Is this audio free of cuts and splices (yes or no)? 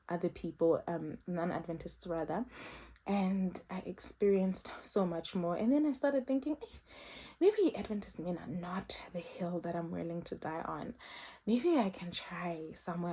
yes